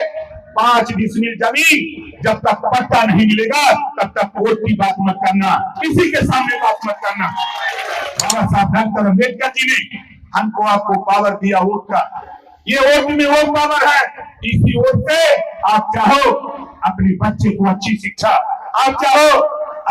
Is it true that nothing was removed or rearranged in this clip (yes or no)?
no